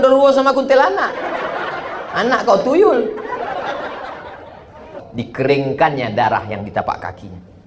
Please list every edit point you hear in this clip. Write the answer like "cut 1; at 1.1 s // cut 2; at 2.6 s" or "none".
cut 1; at 5.0 s